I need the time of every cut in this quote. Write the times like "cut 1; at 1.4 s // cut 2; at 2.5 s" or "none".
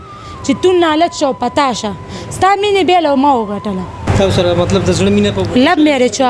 cut 1; at 4.1 s